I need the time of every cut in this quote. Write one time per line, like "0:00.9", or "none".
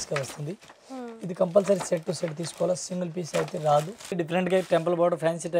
0:04.1